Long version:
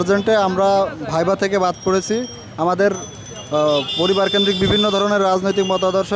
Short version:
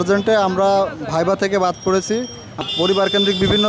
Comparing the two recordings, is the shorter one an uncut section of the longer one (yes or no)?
no